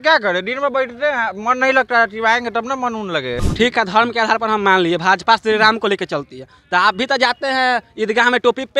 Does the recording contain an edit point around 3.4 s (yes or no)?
yes